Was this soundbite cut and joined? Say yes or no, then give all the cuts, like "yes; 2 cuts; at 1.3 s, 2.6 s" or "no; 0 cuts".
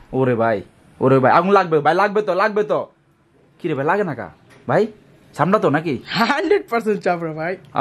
no; 0 cuts